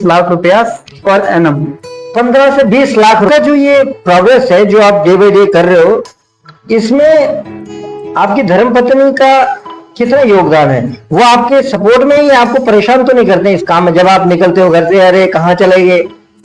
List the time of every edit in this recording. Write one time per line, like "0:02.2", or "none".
0:03.3